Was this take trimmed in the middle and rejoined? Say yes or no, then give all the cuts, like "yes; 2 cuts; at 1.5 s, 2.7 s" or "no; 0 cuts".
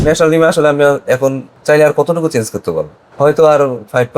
yes; 2 cuts; at 1.5 s, 3.0 s